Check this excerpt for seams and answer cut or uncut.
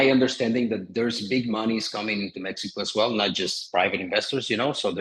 uncut